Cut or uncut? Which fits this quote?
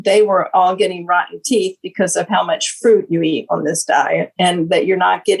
uncut